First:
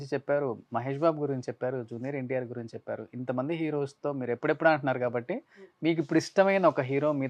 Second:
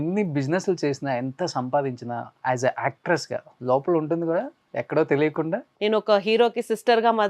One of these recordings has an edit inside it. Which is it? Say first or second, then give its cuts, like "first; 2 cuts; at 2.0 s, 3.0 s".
second; 2 cuts; at 2.3 s, 5.7 s